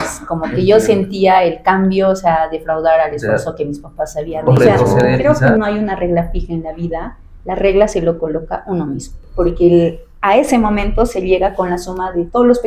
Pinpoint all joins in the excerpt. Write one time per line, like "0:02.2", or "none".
0:05.2
0:09.2